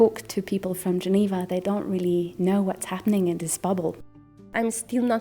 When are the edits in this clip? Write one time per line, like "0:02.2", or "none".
0:04.2